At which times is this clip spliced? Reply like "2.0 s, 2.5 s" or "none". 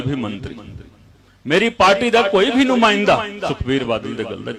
none